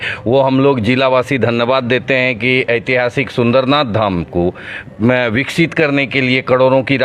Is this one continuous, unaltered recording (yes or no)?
yes